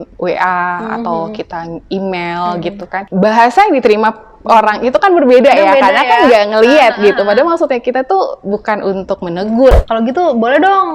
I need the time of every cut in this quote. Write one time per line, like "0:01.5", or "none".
0:03.1
0:09.8